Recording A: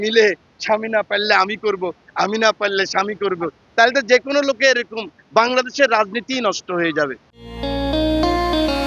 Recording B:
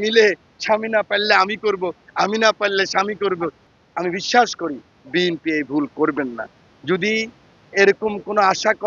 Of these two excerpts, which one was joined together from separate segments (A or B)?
B